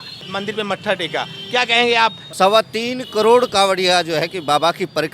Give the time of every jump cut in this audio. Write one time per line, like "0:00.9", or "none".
0:02.2